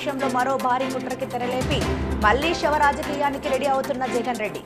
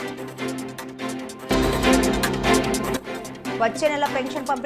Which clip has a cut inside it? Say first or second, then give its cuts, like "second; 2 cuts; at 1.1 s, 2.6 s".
second; 2 cuts; at 1.5 s, 3.4 s